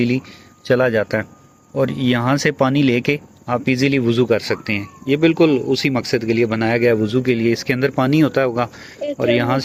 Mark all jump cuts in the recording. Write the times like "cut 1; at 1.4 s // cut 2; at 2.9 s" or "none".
none